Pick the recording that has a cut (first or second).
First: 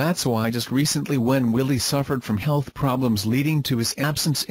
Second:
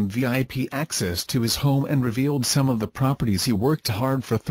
first